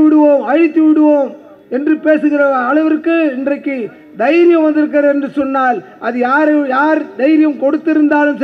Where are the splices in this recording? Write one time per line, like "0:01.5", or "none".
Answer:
none